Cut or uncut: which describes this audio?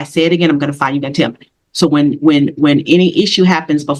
uncut